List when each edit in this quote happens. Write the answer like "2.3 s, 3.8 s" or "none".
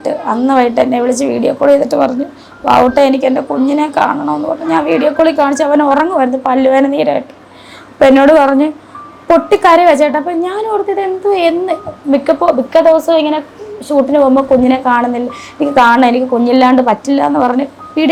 none